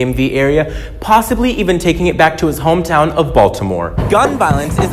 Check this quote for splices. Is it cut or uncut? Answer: cut